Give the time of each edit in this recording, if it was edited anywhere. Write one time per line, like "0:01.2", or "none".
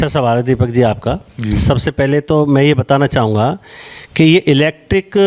none